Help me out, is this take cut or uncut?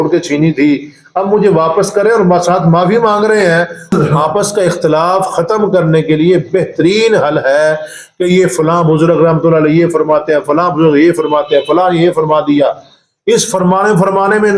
cut